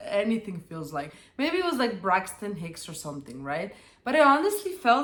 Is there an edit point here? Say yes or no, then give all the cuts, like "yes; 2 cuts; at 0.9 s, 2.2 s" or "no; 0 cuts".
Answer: no; 0 cuts